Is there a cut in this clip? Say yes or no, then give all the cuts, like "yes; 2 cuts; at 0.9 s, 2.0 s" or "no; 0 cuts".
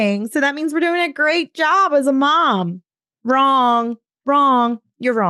yes; 1 cut; at 4.1 s